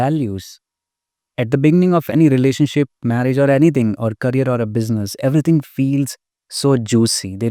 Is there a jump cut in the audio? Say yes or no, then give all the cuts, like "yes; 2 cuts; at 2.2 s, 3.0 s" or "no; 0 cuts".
no; 0 cuts